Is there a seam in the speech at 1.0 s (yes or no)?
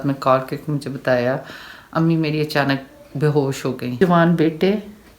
no